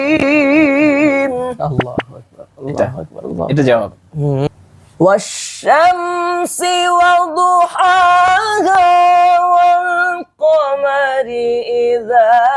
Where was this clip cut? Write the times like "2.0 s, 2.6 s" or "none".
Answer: 4.5 s